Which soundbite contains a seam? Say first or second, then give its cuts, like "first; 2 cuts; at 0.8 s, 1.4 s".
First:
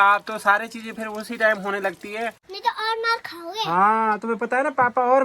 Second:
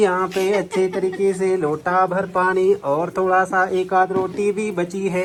first; 1 cut; at 2.4 s